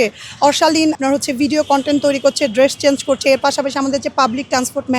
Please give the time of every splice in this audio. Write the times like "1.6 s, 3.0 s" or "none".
1.0 s